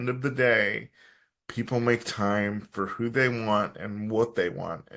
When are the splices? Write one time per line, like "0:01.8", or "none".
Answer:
none